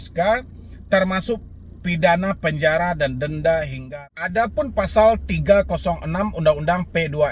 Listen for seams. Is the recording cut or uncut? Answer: cut